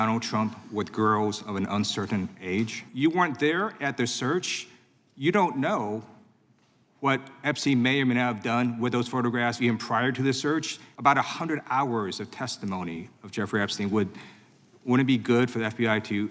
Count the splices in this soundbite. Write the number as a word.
two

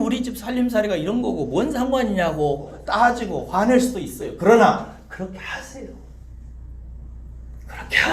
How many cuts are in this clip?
one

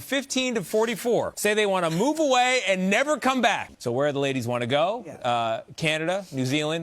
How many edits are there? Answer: one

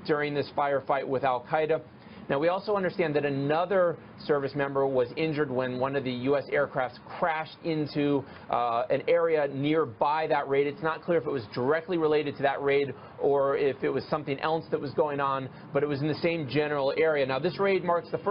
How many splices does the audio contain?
one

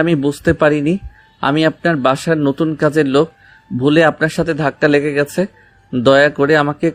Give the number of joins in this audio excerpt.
zero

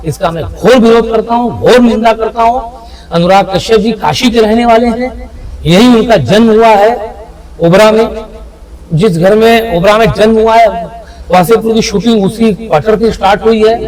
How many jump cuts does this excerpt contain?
zero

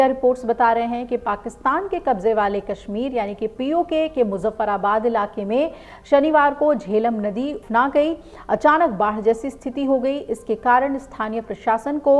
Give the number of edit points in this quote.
one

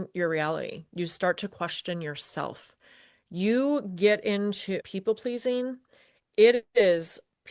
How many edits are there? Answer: one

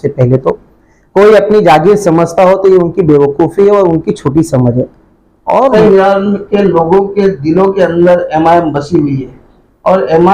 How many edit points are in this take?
one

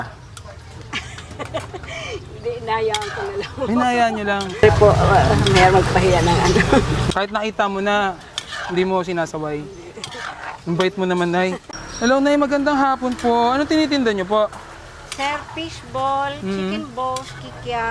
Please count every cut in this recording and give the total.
one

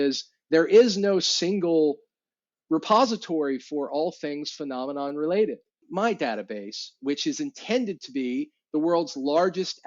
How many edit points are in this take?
one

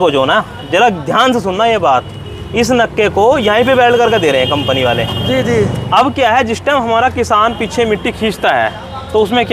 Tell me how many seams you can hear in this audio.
zero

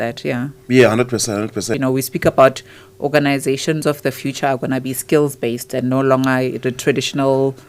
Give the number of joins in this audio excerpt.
one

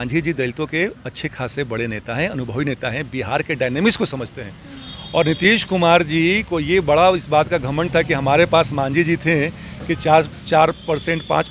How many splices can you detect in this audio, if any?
zero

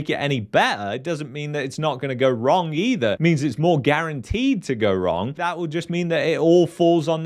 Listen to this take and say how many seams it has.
one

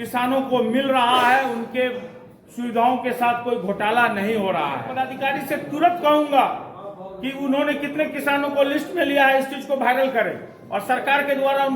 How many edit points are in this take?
one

